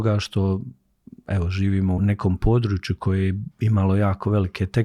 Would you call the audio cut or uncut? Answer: cut